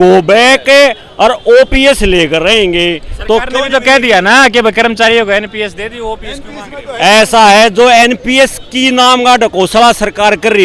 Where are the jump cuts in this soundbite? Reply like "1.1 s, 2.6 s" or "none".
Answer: none